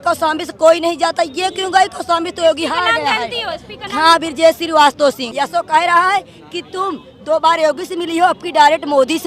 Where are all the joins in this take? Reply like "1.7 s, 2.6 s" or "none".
5.3 s